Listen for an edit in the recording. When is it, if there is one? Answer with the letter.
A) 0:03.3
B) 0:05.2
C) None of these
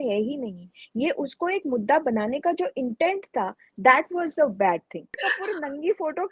B